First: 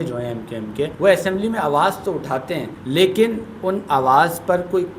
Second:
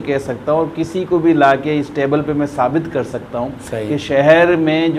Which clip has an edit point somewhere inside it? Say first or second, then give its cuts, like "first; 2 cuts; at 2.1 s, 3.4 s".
first; 2 cuts; at 0.9 s, 2.7 s